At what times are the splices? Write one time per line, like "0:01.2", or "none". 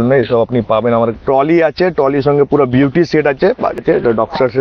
0:01.1
0:03.8